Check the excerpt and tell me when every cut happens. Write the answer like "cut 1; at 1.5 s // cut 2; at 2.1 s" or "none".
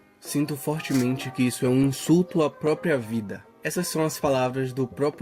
cut 1; at 3.6 s